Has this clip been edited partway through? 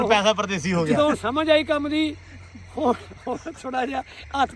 no; 0 cuts

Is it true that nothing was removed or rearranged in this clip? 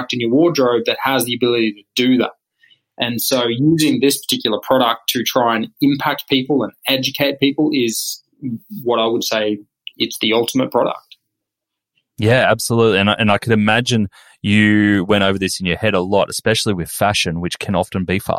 yes; 0 cuts

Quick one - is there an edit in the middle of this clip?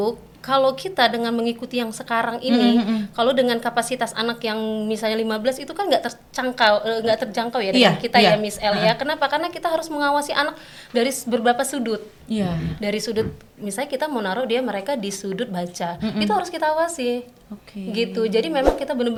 no; 0 cuts

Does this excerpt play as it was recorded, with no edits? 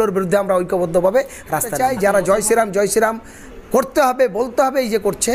no; 1 cut; at 1.8 s

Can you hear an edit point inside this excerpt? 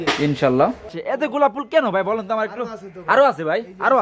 yes; 1 cut; at 1.0 s

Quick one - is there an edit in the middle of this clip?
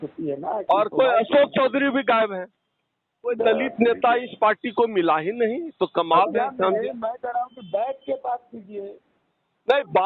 no; 0 cuts

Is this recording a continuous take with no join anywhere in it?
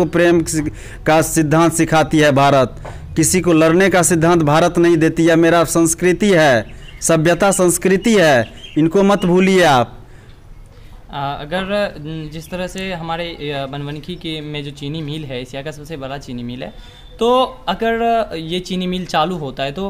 yes; 0 cuts

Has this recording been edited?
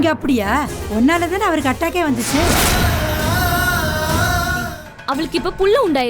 yes; 1 cut; at 4.7 s

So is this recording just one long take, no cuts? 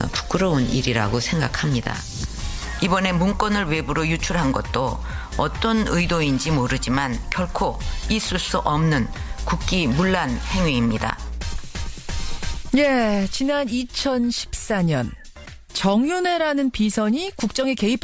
yes; 0 cuts

